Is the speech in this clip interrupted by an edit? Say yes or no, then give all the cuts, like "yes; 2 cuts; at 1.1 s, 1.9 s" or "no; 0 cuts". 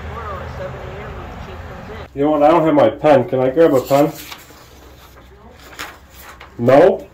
yes; 1 cut; at 2.1 s